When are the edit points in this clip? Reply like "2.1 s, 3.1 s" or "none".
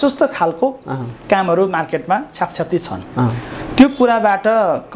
none